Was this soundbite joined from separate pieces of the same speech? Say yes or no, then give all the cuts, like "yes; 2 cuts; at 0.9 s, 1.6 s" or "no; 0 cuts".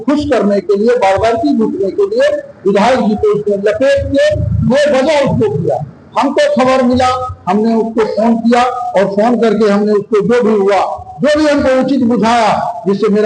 no; 0 cuts